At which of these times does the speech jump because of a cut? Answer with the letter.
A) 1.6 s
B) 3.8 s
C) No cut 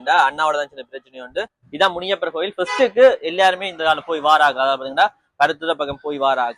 A